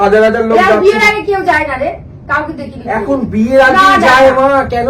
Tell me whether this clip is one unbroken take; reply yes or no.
yes